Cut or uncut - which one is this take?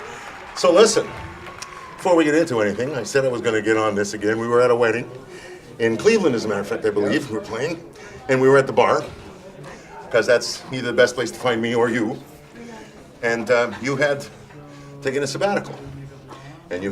cut